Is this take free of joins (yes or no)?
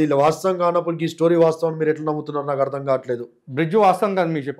yes